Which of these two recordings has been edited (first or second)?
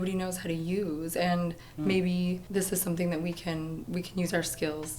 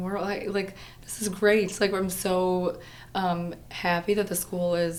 first